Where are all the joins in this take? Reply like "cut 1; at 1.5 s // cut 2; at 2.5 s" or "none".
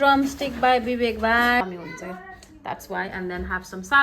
cut 1; at 1.6 s